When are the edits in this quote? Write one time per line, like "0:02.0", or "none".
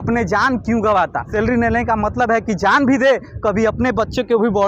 0:01.2